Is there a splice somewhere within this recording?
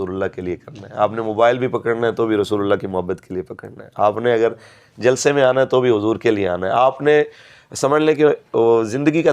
no; 0 cuts

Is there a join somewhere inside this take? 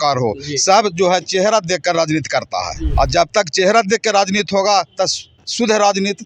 yes; 1 cut; at 2.8 s

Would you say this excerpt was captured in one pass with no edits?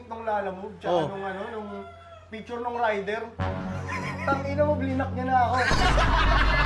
yes; 0 cuts

